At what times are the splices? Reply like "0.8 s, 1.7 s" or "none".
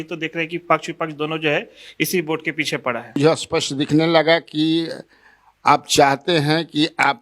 3.2 s